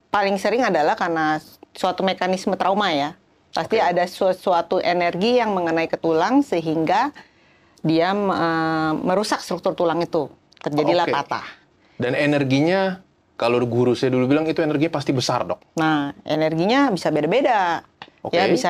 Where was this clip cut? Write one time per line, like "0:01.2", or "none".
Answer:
none